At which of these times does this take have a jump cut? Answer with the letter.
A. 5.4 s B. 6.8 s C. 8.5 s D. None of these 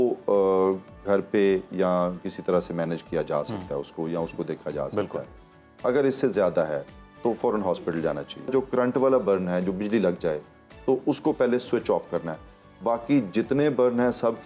C